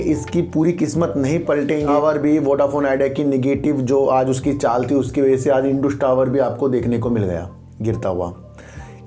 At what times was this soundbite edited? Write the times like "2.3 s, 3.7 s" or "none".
1.9 s